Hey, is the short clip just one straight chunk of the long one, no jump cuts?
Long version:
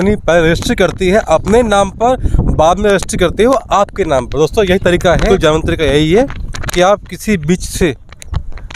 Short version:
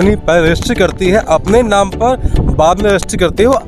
yes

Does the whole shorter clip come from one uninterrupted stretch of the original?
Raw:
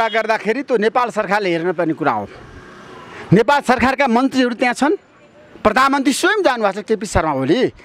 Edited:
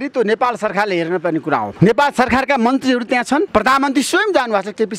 no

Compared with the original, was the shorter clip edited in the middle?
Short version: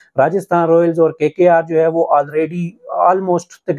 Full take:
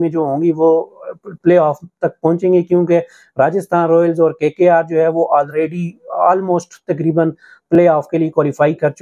no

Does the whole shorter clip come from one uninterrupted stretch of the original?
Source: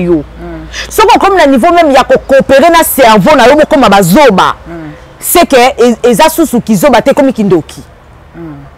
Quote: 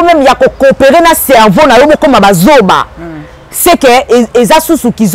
yes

